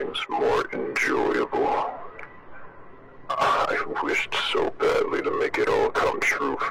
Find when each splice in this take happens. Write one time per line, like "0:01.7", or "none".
none